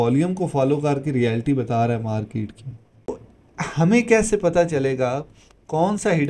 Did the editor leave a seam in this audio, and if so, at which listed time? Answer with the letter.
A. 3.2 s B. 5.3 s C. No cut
A